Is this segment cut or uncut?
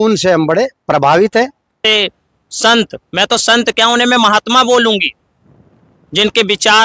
cut